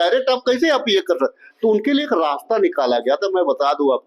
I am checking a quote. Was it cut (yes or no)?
no